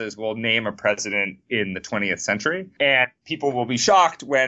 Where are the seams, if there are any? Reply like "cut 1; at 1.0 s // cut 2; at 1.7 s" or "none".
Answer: cut 1; at 2.7 s // cut 2; at 3.2 s